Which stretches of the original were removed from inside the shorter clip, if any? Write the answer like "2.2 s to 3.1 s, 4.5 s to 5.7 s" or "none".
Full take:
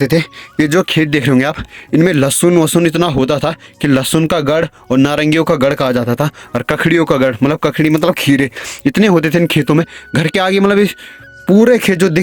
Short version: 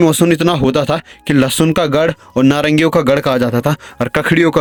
none